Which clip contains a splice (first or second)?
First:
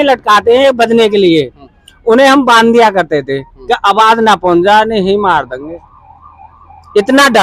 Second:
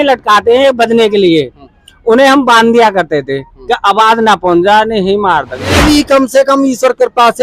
second